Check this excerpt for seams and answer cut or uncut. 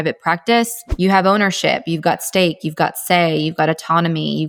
uncut